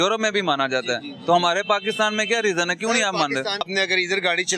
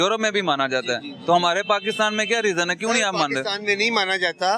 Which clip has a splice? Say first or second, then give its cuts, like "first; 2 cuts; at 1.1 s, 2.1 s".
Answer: first; 1 cut; at 3.6 s